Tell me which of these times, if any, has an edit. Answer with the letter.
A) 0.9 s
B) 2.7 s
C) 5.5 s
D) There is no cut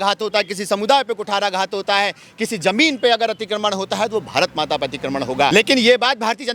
C